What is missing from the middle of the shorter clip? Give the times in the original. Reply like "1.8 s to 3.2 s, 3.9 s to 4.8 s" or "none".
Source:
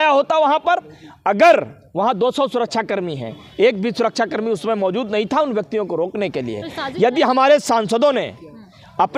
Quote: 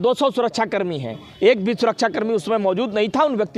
none